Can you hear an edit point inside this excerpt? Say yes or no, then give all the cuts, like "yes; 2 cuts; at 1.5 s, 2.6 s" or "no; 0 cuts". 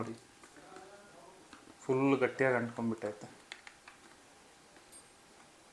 no; 0 cuts